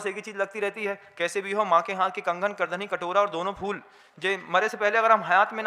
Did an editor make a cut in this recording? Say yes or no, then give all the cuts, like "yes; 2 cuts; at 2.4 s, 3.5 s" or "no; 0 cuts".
no; 0 cuts